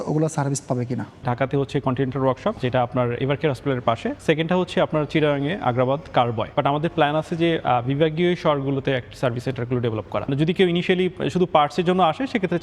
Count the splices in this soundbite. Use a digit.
5